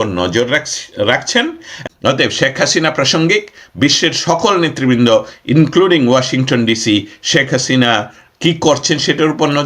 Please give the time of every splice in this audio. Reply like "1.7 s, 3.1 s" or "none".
1.7 s